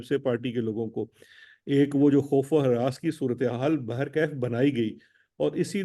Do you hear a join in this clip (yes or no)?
no